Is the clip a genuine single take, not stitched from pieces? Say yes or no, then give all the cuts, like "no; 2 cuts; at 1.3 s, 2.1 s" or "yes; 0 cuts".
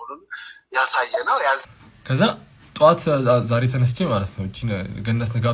no; 1 cut; at 1.7 s